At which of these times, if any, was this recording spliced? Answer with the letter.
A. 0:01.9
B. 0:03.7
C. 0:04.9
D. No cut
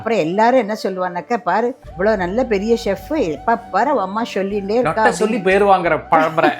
A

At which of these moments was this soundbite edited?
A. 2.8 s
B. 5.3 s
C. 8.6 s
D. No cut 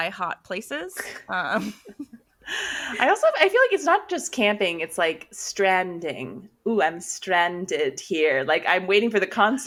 D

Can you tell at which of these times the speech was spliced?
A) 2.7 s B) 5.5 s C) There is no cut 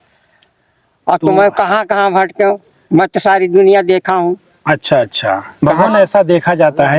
B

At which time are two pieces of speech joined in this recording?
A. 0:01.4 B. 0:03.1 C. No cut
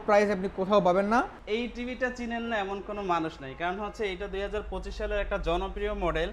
A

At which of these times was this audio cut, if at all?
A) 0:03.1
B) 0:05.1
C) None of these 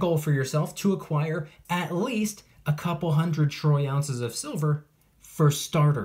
C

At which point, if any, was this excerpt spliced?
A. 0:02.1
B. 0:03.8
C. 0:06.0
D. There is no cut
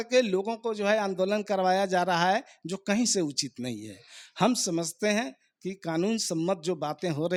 D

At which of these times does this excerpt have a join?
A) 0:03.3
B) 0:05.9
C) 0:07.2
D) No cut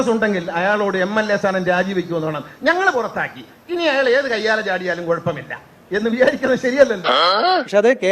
C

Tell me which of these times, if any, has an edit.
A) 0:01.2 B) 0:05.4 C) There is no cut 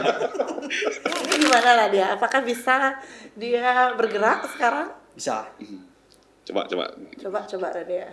A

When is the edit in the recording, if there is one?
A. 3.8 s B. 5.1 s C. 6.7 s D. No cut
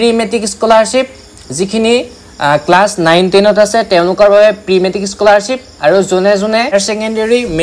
C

